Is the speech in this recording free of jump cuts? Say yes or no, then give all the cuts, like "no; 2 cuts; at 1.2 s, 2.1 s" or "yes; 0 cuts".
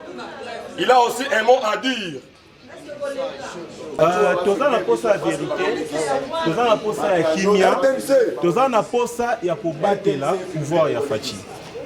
no; 1 cut; at 4.0 s